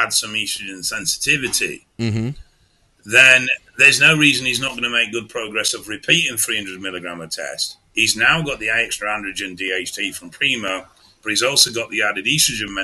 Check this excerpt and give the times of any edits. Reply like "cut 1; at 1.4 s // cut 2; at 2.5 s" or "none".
none